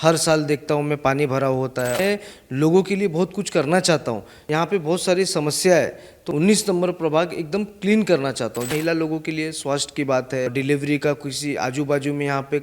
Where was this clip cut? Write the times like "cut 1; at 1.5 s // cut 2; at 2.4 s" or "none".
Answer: cut 1; at 2.0 s // cut 2; at 4.3 s // cut 3; at 6.1 s // cut 4; at 8.7 s // cut 5; at 10.5 s